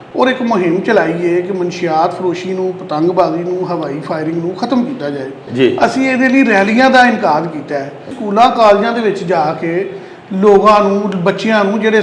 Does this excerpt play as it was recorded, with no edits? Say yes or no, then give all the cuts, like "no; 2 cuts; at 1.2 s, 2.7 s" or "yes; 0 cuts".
no; 2 cuts; at 5.4 s, 8.1 s